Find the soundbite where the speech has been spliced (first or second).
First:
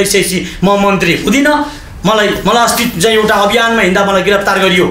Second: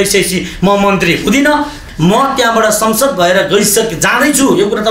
second